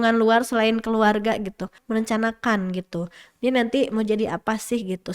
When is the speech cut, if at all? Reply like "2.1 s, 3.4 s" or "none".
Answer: 1.7 s